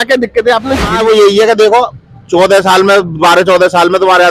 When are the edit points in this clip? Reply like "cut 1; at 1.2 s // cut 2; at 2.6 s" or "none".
cut 1; at 0.9 s